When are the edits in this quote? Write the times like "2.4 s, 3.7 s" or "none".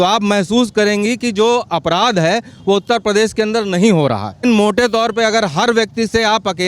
4.4 s